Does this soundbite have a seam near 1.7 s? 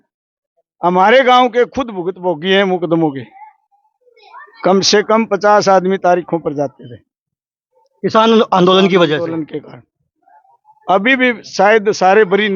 no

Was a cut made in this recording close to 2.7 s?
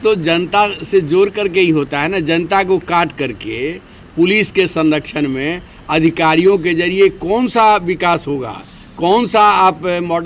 no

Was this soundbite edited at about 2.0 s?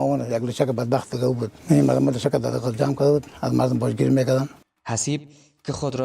no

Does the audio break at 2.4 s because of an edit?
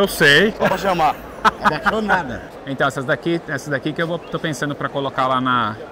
yes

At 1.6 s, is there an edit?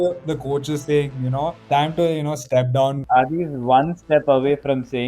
yes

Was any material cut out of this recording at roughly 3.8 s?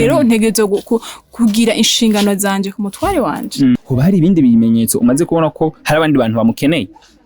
yes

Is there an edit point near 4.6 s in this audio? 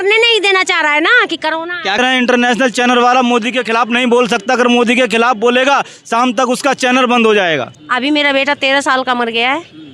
no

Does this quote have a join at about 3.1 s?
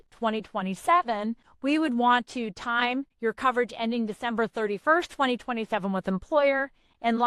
yes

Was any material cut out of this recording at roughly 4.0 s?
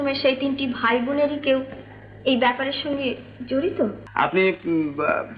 yes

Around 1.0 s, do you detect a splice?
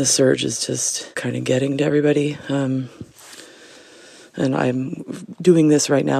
yes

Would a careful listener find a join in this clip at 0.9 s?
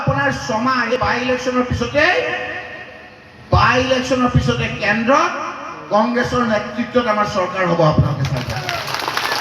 yes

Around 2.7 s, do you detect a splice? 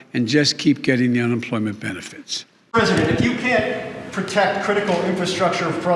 yes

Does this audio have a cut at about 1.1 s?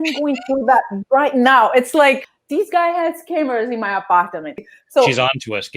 no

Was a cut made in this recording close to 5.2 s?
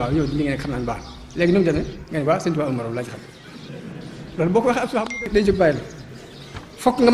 yes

